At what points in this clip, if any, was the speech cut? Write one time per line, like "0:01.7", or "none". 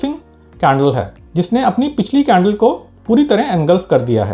0:01.2